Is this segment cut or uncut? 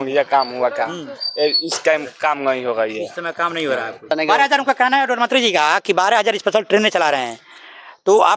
cut